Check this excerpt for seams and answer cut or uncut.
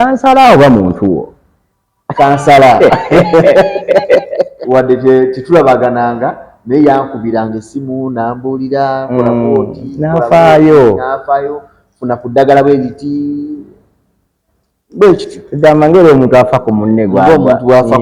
cut